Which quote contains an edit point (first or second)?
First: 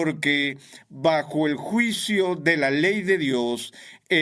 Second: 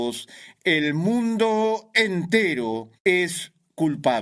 second